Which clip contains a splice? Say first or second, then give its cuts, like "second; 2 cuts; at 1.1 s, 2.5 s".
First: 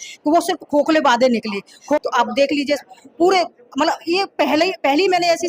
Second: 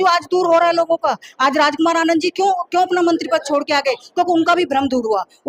first; 1 cut; at 2.0 s